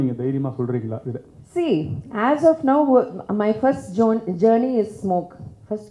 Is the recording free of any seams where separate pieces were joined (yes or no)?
yes